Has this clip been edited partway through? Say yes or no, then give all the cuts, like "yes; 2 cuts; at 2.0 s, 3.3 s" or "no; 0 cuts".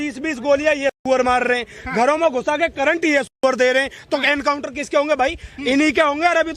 no; 0 cuts